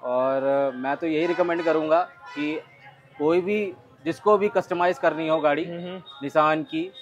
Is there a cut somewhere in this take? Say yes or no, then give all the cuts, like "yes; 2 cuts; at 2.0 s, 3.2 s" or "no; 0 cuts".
no; 0 cuts